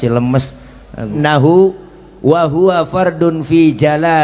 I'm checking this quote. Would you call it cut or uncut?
cut